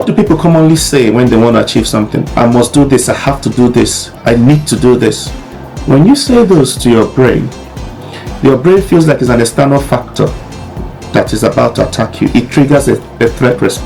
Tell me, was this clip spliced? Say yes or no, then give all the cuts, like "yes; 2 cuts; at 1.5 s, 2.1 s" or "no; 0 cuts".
no; 0 cuts